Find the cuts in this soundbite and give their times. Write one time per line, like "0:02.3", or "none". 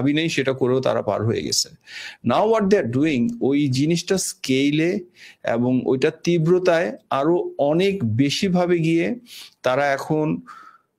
none